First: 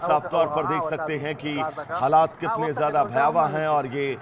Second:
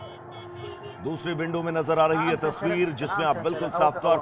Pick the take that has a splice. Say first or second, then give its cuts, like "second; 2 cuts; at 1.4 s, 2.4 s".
second; 1 cut; at 0.9 s